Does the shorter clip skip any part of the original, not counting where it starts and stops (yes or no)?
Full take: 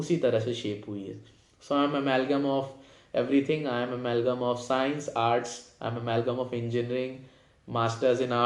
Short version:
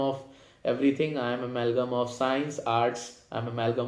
no